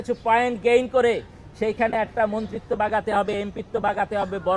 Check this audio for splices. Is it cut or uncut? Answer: uncut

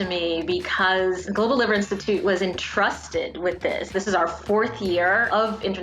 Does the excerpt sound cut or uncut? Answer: cut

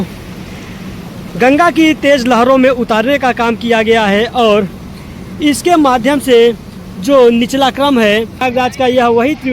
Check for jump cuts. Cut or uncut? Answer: cut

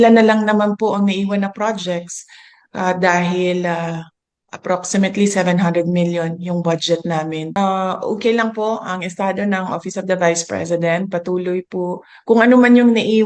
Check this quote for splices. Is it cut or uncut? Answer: cut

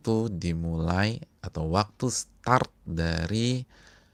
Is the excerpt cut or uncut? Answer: uncut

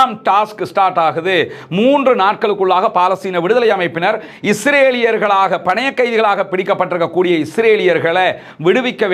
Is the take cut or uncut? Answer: uncut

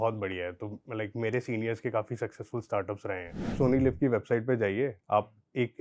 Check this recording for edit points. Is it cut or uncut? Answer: cut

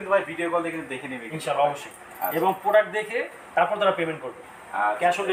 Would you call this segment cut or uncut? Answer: uncut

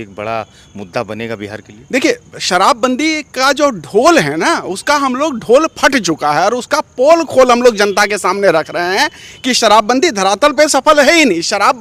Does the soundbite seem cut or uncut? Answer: uncut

